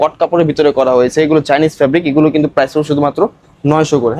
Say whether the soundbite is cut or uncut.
uncut